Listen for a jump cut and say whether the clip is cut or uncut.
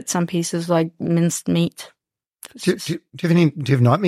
uncut